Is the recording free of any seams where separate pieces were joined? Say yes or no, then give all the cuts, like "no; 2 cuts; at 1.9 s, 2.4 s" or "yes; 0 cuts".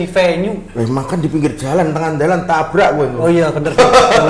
yes; 0 cuts